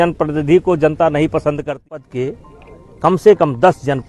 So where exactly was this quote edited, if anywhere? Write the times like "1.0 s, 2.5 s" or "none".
2.0 s